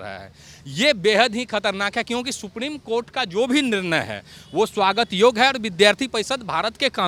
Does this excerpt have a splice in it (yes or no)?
no